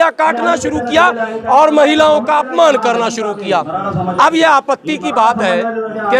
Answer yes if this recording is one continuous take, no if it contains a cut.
yes